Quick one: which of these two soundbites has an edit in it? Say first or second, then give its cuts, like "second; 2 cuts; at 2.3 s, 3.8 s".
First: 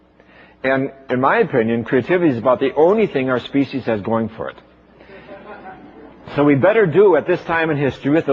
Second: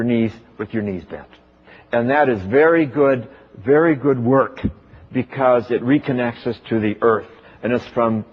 first; 1 cut; at 1.8 s